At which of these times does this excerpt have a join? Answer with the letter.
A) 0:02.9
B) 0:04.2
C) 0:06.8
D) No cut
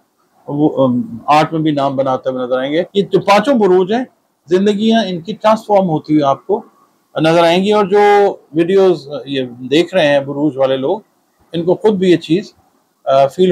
A